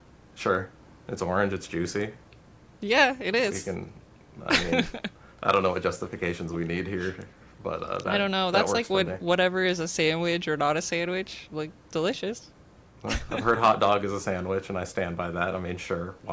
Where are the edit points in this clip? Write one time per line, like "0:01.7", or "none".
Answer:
none